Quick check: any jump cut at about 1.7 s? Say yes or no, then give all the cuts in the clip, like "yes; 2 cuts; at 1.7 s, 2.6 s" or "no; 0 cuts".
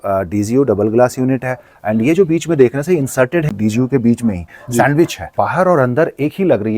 no; 2 cuts; at 3.5 s, 5.2 s